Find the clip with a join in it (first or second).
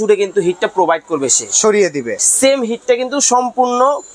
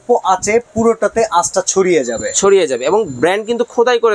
first